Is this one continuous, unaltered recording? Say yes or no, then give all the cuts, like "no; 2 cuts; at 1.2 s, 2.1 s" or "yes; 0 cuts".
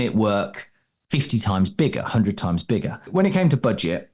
no; 1 cut; at 3.0 s